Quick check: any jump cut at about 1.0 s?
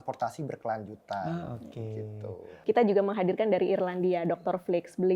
no; 1 cut; at 2.5 s

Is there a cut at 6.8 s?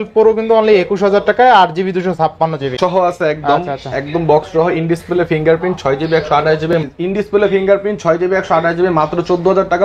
yes; 2 cuts; at 2.7 s, 6.8 s

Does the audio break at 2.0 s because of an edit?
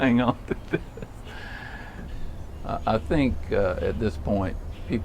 yes; 1 cut; at 2.0 s

